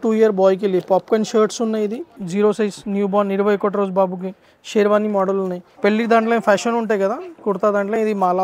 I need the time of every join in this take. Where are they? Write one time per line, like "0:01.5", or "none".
0:02.2
0:05.6